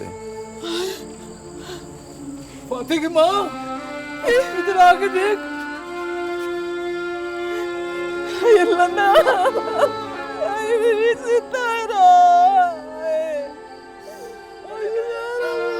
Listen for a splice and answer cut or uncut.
uncut